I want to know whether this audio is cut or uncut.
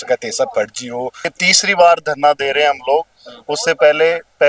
cut